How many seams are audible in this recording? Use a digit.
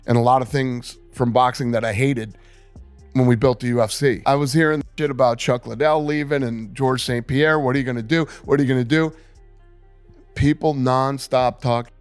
1